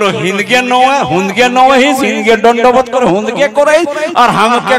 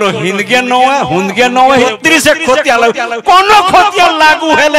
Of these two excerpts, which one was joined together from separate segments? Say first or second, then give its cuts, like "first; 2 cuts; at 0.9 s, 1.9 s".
second; 1 cut; at 1.8 s